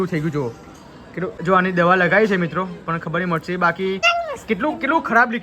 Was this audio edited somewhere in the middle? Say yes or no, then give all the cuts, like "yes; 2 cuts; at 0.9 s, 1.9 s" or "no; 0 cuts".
yes; 2 cuts; at 1.4 s, 4.0 s